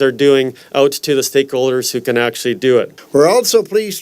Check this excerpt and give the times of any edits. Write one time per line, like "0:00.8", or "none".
0:03.0